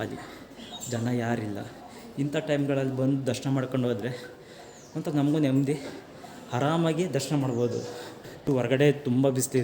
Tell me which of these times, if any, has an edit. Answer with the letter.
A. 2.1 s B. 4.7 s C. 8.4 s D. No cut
C